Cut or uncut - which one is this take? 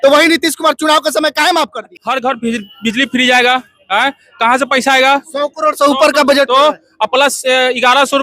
cut